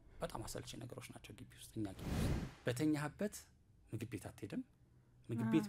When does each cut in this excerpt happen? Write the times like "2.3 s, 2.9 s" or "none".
2.1 s